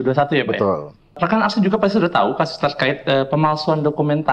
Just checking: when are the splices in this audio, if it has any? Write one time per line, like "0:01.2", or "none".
0:01.2